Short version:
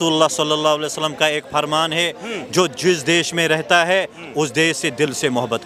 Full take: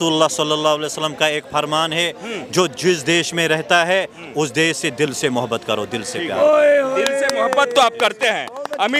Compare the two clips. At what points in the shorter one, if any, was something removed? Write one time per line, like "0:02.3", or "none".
none